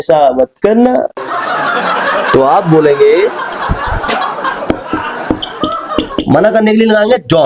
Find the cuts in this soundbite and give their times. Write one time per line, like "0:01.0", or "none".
none